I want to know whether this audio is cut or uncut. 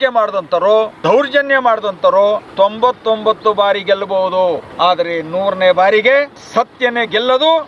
cut